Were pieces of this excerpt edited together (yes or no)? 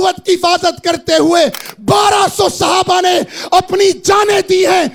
no